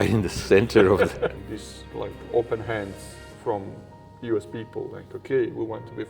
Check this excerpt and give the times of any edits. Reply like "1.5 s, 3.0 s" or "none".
1.4 s